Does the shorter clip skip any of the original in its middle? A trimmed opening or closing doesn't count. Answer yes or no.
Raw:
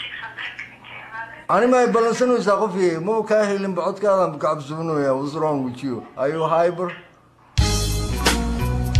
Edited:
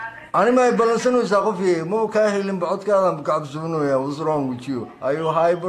no